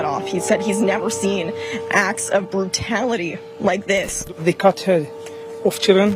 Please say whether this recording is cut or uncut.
cut